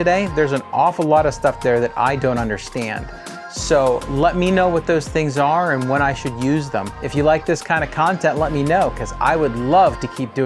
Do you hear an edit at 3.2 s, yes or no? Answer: no